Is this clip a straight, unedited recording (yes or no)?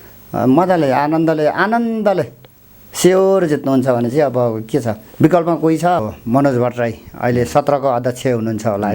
no